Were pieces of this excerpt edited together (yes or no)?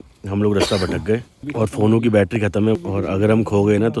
yes